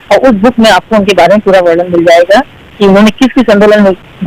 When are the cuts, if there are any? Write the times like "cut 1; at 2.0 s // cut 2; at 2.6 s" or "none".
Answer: none